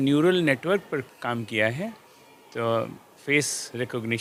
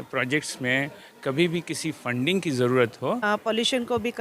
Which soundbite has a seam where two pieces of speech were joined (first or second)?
second